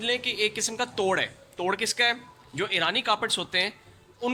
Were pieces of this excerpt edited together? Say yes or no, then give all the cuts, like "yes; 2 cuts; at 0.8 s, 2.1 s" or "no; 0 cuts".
no; 0 cuts